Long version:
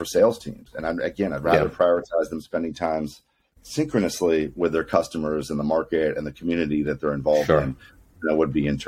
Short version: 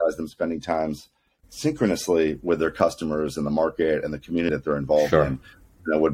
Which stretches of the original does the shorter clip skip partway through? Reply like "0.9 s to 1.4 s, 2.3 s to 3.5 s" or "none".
6.6 s to 6.9 s